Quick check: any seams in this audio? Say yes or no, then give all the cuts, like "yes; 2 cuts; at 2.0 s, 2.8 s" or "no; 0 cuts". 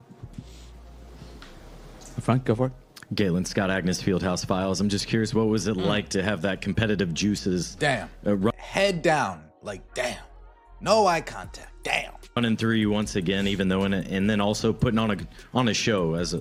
no; 0 cuts